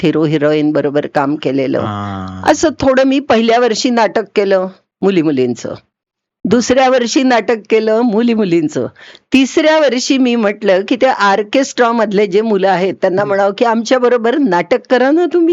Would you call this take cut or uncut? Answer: uncut